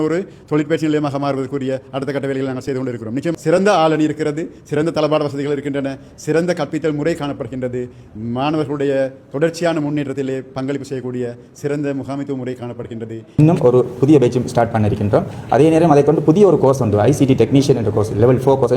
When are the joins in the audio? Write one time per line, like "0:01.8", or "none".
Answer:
0:03.3
0:13.2